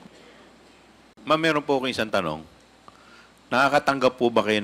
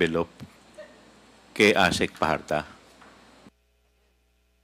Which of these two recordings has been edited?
first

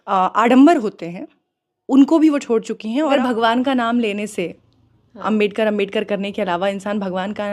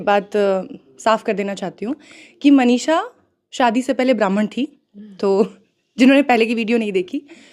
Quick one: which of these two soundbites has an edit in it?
first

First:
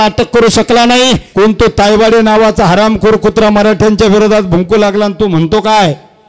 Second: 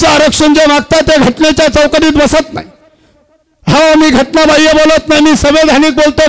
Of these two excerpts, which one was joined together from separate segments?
first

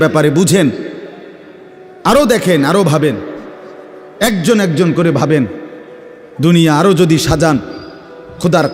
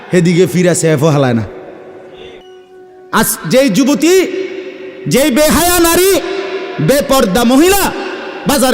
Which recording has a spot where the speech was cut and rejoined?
second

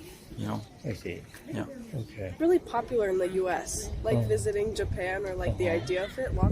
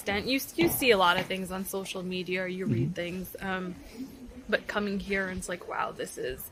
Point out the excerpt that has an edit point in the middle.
first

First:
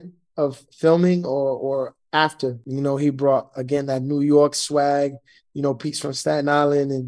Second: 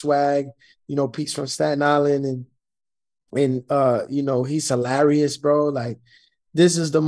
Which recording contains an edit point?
first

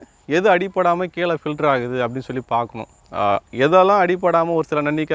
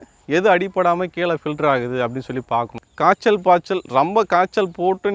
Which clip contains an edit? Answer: second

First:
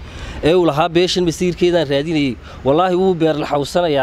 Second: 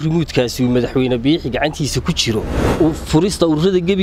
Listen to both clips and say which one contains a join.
second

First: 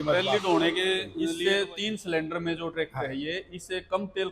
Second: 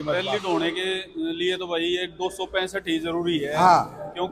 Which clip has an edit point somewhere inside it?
first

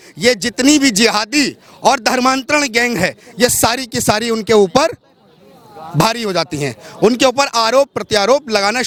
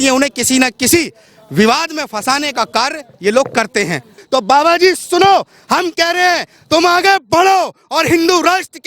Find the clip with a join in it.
second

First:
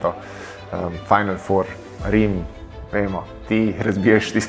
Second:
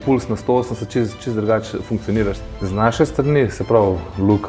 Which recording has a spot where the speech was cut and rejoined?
second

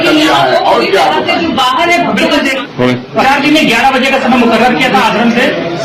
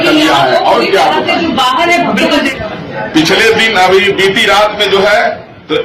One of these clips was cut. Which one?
second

